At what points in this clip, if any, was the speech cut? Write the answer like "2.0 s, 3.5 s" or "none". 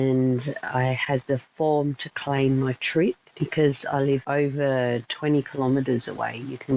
3.3 s, 4.2 s